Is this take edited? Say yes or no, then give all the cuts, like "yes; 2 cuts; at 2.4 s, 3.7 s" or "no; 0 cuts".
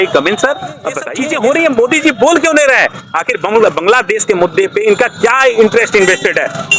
yes; 1 cut; at 1.1 s